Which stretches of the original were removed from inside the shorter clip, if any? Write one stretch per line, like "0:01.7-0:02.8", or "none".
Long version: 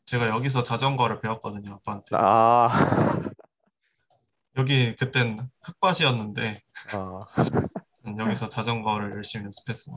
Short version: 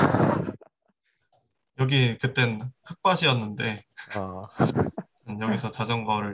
none